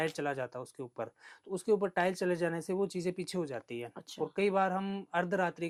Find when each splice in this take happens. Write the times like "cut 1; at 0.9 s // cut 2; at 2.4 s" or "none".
none